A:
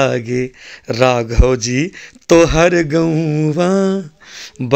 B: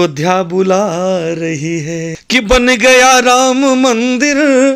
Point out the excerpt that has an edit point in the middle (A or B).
B